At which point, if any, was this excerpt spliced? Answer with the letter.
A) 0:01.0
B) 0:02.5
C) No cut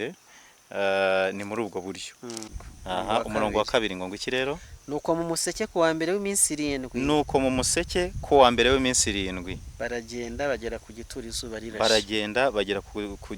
B